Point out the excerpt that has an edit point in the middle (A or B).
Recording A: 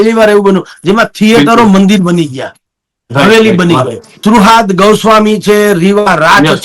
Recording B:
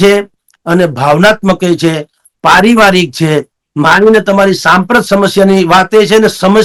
A